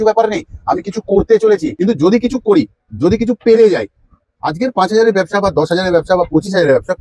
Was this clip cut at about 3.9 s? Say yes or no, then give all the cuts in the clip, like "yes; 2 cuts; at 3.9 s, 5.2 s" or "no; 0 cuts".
no; 1 cut; at 1.7 s